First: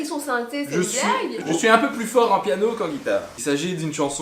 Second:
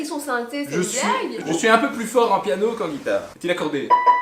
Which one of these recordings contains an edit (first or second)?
first